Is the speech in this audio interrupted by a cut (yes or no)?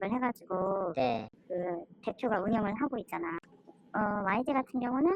yes